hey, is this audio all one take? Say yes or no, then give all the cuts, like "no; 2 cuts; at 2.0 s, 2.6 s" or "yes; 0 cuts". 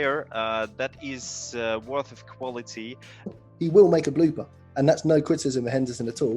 no; 1 cut; at 3.3 s